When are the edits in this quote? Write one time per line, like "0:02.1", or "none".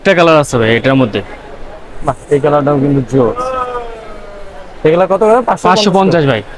none